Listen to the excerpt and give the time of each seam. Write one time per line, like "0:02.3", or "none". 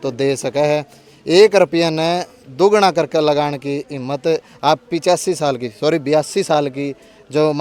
none